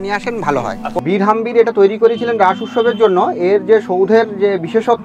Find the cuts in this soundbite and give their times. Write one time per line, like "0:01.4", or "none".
0:01.0